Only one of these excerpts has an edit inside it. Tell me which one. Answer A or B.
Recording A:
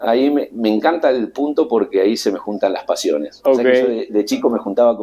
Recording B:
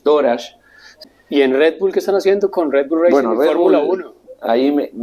B